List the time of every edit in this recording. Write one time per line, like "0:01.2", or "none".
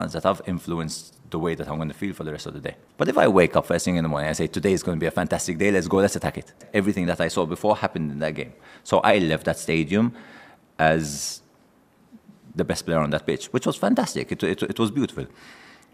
0:02.8
0:06.6